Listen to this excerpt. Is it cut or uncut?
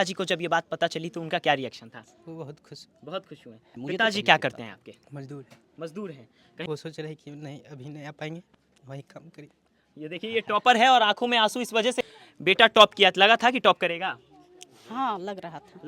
cut